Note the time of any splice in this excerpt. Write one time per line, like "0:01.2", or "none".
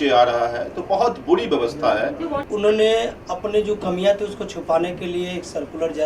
0:02.4